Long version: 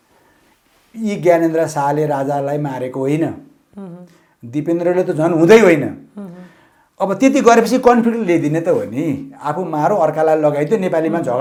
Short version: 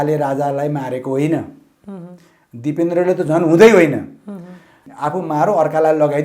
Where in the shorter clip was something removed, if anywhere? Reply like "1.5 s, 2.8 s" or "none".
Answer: 4.9 s